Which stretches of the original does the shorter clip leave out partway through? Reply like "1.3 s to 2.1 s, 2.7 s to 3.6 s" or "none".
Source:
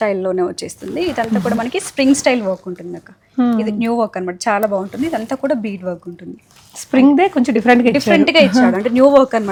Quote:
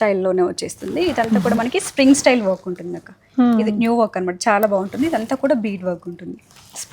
none